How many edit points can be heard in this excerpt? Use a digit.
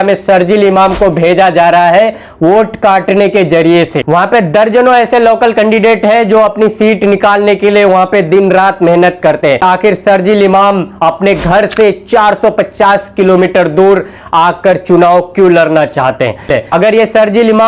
3